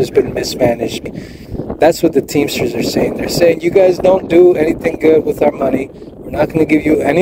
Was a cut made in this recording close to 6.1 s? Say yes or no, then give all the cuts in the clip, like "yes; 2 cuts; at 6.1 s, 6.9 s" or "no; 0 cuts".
no; 1 cut; at 1.0 s